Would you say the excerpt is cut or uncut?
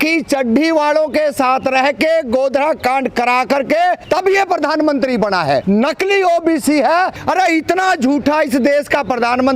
cut